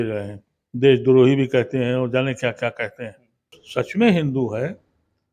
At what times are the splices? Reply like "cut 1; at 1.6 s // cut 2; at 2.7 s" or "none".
cut 1; at 3.6 s